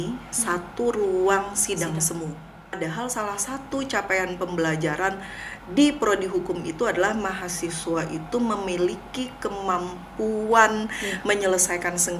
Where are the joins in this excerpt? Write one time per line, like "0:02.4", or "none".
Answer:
0:02.8